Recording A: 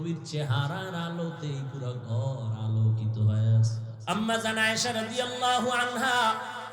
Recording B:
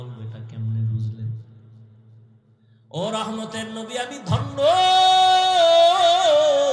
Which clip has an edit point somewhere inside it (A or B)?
A